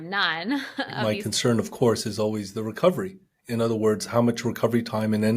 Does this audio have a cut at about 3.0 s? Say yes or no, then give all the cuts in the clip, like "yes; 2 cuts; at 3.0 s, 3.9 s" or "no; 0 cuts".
no; 1 cut; at 0.9 s